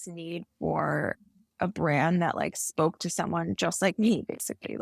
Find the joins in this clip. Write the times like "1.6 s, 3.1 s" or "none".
none